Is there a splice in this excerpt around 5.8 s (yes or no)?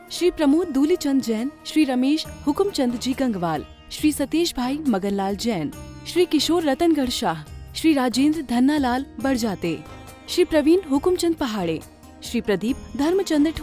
no